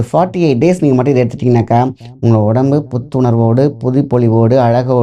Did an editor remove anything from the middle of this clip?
no; 0 cuts

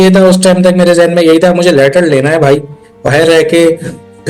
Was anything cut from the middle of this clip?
yes; 1 cut; at 3.1 s

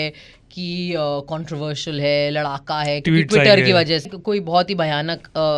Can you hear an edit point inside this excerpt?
yes; 1 cut; at 4.1 s

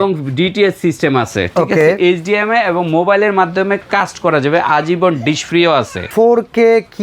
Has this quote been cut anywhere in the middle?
yes; 1 cut; at 6.1 s

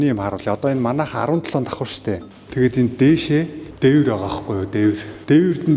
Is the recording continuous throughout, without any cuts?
no; 1 cut; at 2.2 s

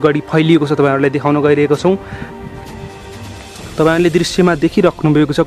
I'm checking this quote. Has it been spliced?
no; 0 cuts

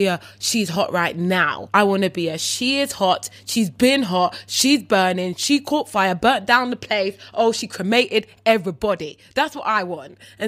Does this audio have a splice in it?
yes; 1 cut; at 1.6 s

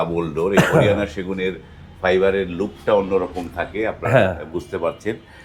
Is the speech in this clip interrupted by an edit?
no; 0 cuts

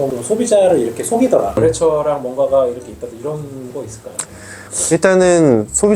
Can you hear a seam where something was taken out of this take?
yes; 1 cut; at 1.6 s

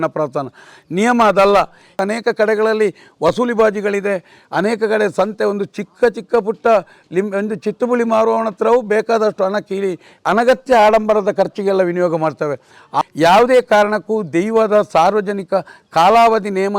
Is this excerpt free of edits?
no; 2 cuts; at 2.0 s, 13.0 s

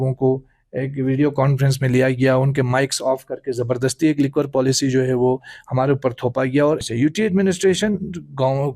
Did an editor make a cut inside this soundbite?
yes; 1 cut; at 6.8 s

